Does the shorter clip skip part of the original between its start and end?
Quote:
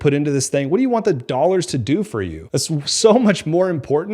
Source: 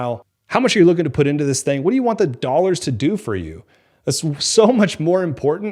yes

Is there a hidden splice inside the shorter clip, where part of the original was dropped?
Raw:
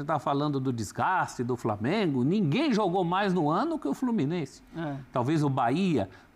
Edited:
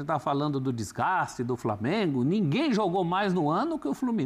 no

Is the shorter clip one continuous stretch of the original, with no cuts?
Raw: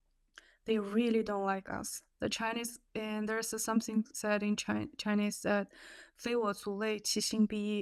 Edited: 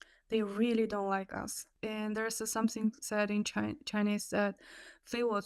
no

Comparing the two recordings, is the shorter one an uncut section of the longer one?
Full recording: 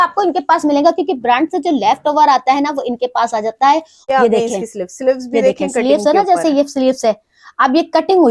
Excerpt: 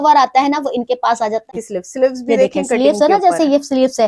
no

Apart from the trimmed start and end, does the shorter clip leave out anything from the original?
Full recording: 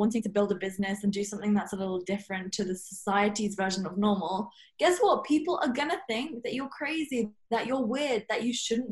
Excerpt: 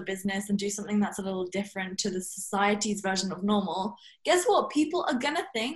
no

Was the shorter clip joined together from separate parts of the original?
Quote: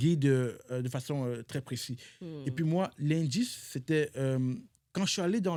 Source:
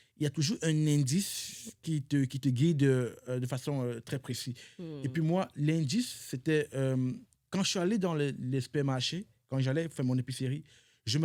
no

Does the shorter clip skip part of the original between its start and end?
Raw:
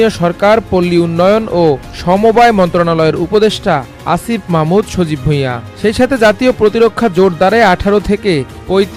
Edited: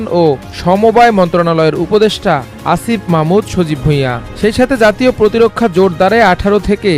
no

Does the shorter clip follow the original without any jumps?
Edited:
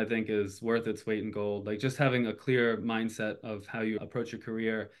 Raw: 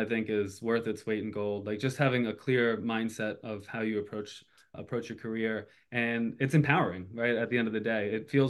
no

